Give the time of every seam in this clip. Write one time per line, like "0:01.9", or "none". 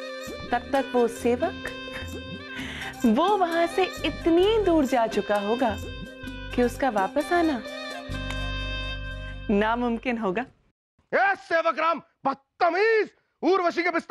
0:10.8